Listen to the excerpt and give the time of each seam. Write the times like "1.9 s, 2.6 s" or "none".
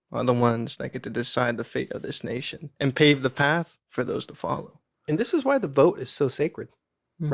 none